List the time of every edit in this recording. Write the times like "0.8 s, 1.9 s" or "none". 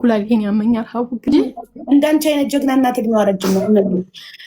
1.3 s